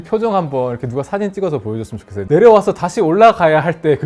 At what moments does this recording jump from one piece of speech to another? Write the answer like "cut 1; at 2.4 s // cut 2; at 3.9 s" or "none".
cut 1; at 2.2 s